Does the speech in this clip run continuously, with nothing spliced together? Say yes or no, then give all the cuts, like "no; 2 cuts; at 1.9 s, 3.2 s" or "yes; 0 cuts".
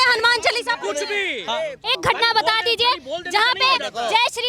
no; 1 cut; at 1.8 s